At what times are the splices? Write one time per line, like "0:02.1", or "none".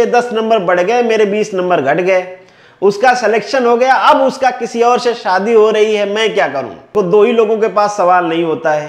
0:06.8